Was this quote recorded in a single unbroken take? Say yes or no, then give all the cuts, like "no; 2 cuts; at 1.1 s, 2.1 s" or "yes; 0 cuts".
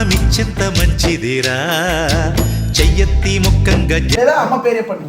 no; 1 cut; at 4.2 s